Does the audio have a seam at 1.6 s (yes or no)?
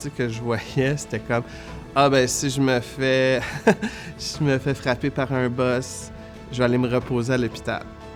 no